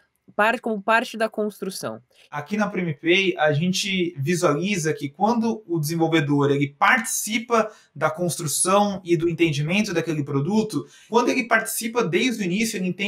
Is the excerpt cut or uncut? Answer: cut